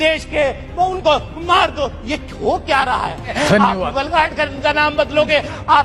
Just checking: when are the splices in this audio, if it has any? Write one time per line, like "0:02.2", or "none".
0:03.3